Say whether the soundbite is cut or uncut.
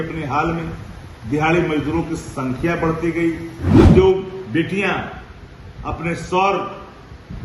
cut